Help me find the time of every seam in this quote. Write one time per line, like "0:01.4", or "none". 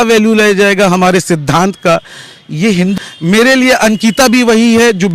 0:02.9